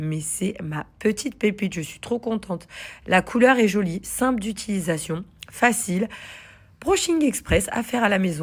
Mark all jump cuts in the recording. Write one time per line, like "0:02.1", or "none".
none